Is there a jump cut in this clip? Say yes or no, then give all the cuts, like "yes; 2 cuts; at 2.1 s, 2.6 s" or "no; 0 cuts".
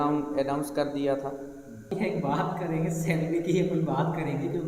yes; 1 cut; at 1.9 s